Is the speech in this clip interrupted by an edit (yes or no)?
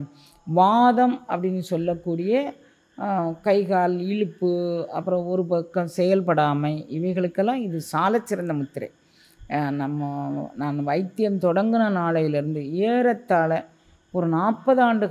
no